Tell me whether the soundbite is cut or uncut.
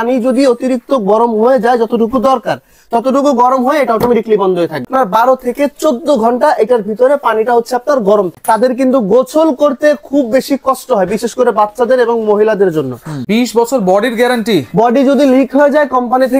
cut